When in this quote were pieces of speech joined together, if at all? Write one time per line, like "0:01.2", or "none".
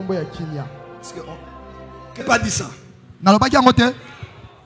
0:02.2